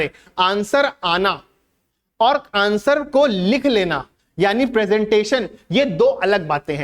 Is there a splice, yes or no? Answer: no